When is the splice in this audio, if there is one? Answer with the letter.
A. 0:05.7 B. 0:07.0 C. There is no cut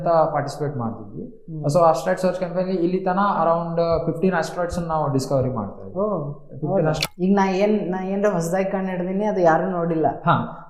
B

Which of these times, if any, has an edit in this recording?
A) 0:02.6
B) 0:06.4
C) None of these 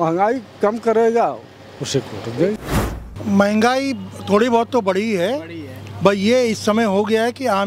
A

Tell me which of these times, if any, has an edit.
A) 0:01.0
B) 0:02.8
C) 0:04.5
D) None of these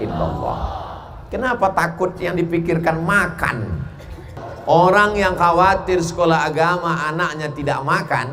C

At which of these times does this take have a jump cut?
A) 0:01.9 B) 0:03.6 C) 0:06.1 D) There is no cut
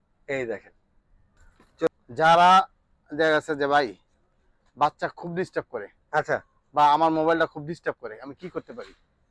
A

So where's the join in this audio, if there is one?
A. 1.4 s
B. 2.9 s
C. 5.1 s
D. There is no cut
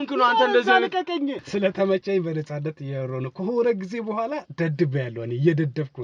A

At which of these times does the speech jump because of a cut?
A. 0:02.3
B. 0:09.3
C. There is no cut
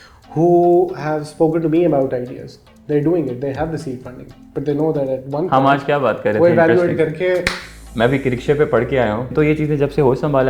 B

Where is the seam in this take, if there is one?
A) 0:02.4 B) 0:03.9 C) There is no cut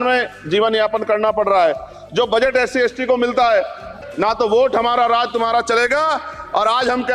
B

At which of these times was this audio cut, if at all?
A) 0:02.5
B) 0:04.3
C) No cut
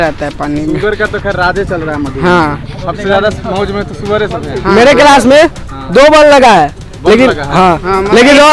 C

